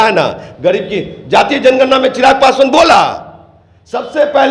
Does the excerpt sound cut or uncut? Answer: uncut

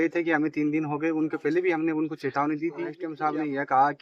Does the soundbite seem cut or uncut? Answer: cut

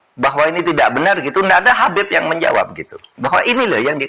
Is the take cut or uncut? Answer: uncut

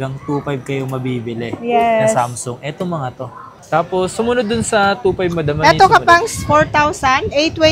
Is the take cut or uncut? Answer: uncut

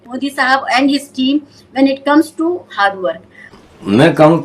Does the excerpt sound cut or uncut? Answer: cut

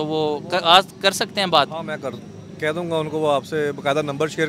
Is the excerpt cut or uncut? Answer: uncut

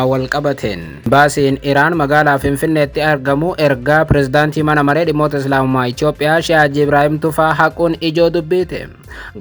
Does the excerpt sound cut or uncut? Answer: cut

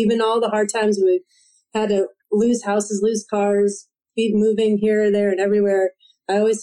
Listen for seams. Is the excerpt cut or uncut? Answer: uncut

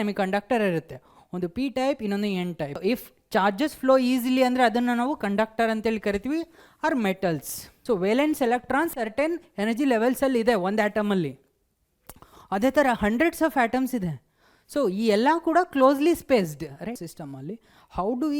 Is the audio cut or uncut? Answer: cut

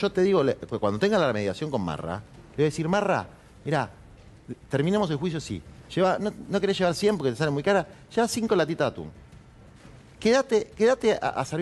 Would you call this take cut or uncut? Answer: uncut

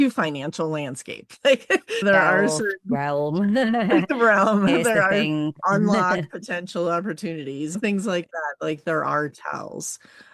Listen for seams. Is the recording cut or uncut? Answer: uncut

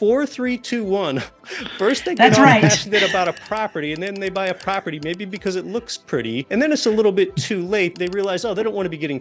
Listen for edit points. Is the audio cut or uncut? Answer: cut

